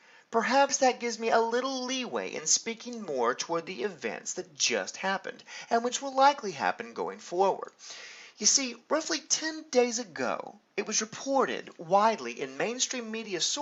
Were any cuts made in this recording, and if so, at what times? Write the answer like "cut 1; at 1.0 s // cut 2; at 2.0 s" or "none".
none